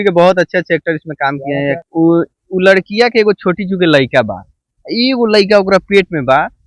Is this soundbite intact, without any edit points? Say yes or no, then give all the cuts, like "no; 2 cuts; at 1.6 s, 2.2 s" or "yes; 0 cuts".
no; 1 cut; at 1.6 s